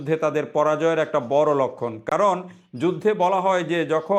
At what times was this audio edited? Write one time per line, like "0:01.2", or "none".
none